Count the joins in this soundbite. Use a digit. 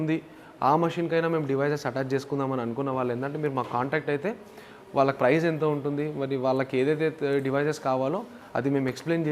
0